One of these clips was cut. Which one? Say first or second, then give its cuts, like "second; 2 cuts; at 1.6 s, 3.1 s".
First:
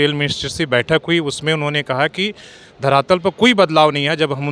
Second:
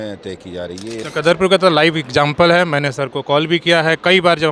second; 1 cut; at 1.0 s